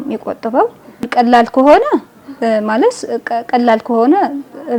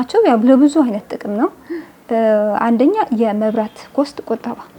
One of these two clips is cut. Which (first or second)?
first